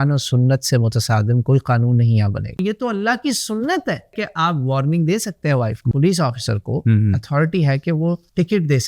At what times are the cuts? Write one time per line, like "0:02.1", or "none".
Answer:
0:02.5
0:05.9